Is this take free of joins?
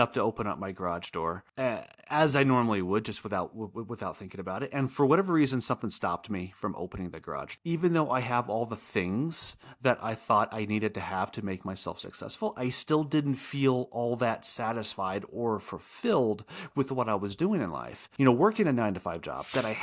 no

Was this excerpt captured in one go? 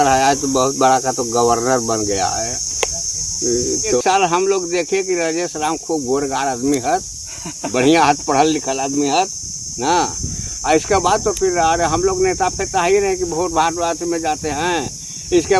yes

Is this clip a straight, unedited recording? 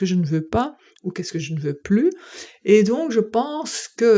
yes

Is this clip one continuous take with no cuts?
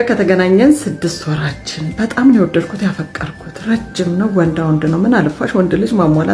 yes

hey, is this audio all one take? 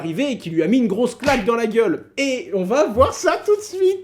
yes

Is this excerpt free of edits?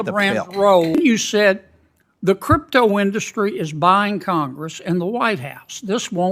no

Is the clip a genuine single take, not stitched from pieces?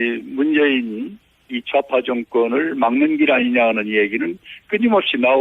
no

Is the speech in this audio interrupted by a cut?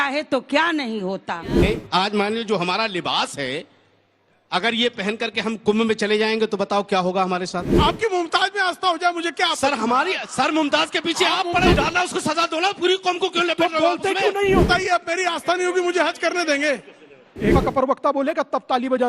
yes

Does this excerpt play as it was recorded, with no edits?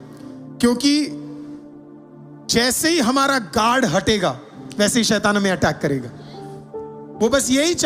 yes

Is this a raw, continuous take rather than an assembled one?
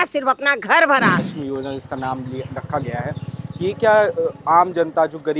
no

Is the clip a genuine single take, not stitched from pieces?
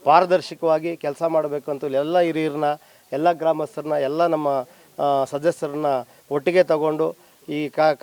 yes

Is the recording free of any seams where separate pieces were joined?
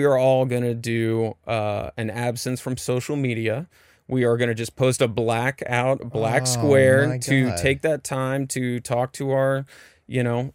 yes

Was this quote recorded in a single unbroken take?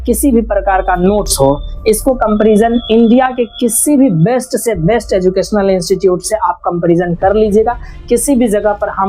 yes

